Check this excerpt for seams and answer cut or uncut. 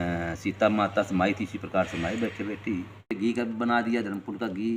cut